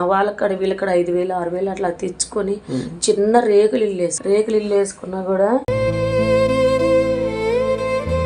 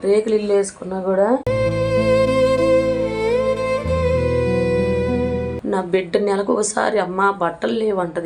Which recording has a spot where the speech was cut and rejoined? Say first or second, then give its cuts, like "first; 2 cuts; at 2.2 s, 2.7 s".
second; 1 cut; at 5.6 s